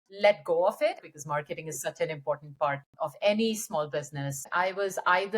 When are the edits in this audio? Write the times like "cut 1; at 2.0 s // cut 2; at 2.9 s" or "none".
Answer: cut 1; at 1.0 s // cut 2; at 2.9 s // cut 3; at 4.4 s